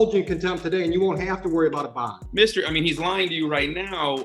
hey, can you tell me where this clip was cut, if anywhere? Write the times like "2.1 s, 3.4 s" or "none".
2.2 s